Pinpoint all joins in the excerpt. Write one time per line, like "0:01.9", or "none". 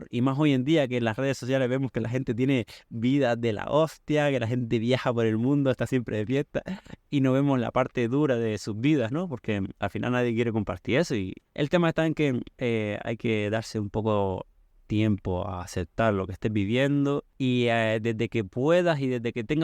0:11.3
0:12.5